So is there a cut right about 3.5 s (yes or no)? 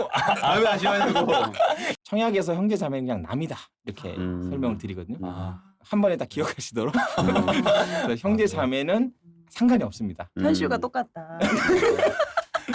no